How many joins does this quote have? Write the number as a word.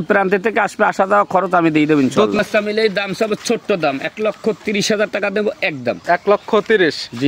one